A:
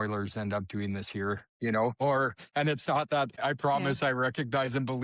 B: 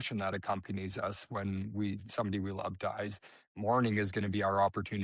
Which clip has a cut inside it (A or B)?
A